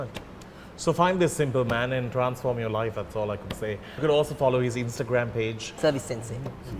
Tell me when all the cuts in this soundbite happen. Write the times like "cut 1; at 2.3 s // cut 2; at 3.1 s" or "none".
cut 1; at 4.0 s // cut 2; at 5.8 s